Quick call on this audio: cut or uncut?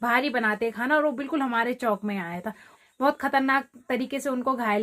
cut